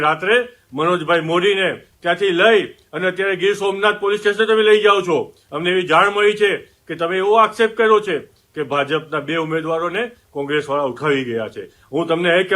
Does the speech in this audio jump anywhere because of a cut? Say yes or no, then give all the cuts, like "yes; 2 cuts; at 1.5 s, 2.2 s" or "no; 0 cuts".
no; 0 cuts